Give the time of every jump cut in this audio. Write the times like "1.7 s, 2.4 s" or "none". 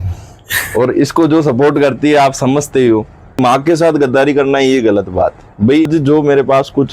3.4 s, 5.9 s